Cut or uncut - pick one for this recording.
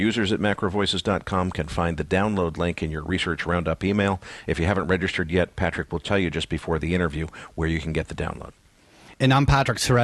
uncut